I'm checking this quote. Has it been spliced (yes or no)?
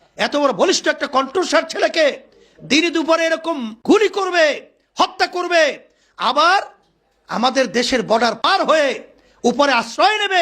yes